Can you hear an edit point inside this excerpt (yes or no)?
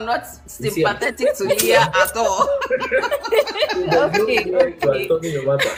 no